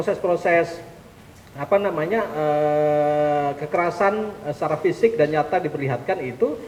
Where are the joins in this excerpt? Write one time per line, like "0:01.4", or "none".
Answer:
none